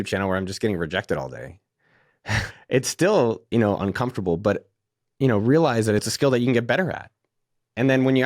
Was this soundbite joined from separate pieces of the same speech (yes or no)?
yes